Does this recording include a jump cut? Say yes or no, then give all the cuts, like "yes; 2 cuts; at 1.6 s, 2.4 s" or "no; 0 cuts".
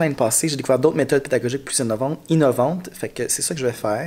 no; 0 cuts